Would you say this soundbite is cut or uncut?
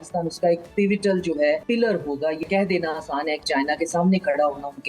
cut